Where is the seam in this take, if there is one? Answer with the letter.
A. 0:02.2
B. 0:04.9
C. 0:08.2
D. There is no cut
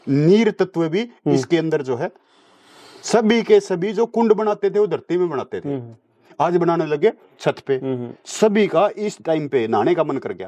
D